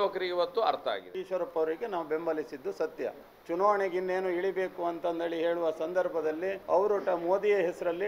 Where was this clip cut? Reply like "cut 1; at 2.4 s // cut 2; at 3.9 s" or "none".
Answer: cut 1; at 1.1 s // cut 2; at 3.3 s // cut 3; at 6.6 s